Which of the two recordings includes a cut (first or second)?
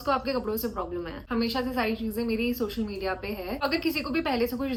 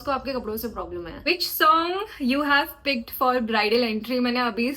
second